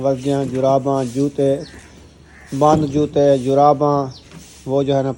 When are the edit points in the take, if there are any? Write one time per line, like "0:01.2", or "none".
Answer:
none